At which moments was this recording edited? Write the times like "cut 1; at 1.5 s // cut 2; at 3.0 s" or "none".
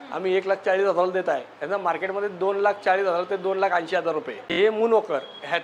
cut 1; at 4.4 s